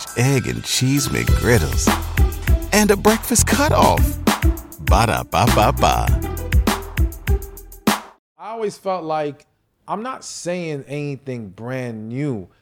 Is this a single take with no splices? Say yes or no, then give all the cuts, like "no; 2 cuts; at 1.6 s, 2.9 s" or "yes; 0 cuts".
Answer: no; 1 cut; at 8.5 s